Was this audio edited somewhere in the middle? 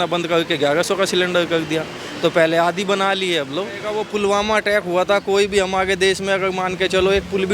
yes; 1 cut; at 4.0 s

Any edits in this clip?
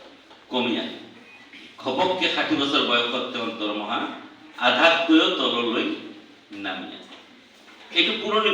no; 0 cuts

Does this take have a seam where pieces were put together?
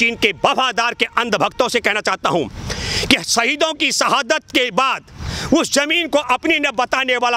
no; 0 cuts

